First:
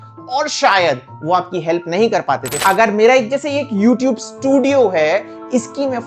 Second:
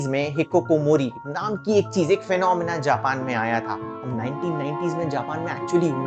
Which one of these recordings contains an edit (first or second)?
first